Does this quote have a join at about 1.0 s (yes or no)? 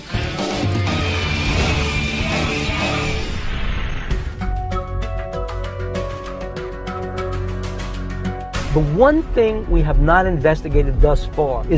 no